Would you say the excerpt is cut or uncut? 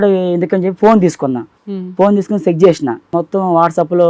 cut